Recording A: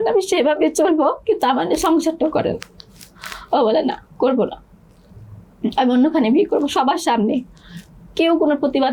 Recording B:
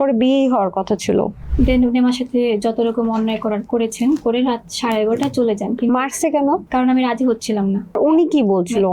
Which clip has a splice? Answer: B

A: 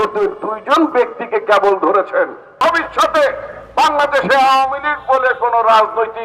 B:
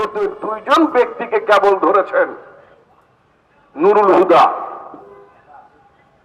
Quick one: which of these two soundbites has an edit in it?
A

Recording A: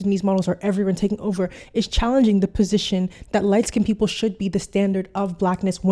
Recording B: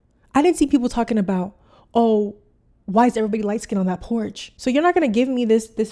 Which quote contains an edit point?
B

